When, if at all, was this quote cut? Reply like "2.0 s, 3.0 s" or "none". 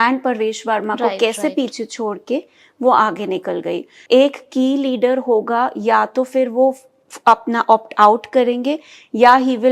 3.9 s